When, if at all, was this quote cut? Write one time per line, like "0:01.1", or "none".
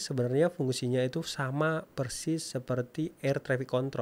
none